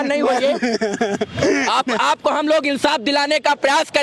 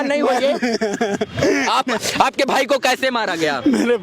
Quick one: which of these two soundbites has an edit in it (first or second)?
second